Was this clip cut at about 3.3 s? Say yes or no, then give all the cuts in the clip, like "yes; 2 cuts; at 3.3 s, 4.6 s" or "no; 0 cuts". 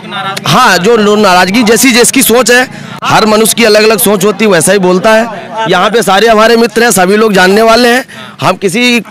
no; 0 cuts